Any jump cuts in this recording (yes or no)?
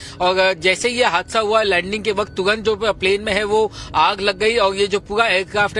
yes